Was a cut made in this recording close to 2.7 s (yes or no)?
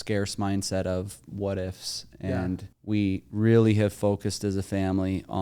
yes